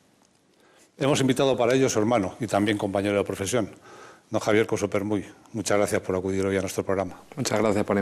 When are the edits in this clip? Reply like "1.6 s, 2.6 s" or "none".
7.1 s